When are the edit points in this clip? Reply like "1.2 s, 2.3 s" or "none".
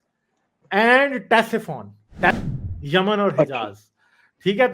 2.4 s